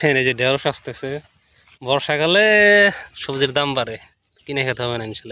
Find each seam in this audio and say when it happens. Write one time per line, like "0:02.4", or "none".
none